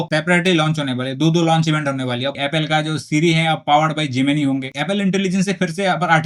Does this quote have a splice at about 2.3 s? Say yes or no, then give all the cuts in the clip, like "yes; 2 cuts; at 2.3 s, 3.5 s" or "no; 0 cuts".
yes; 2 cuts; at 2.3 s, 4.7 s